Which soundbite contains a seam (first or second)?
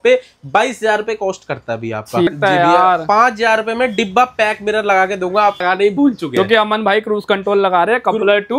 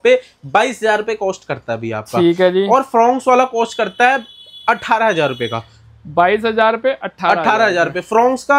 first